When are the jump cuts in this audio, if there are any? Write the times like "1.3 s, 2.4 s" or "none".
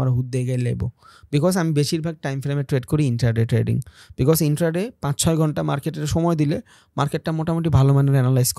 none